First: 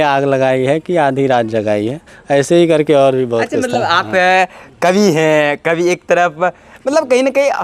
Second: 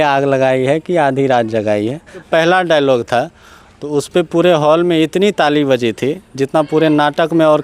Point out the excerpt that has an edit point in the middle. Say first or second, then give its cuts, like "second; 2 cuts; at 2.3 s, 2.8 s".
second; 1 cut; at 2.2 s